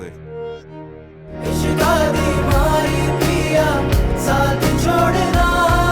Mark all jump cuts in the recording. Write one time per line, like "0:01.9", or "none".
0:01.4